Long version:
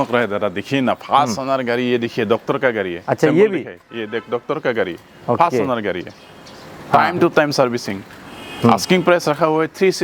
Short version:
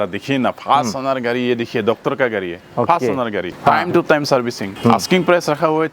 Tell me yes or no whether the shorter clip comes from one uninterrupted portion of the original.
no